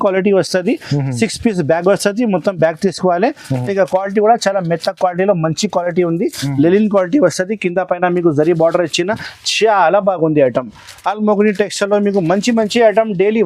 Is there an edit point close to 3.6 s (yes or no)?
yes